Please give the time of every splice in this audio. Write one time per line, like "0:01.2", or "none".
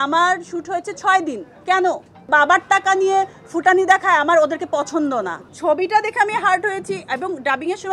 0:02.2
0:05.4